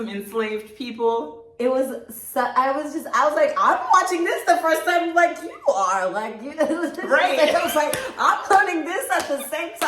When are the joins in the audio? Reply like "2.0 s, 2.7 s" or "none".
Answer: none